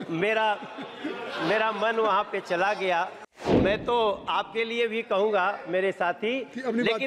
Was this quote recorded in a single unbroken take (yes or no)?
no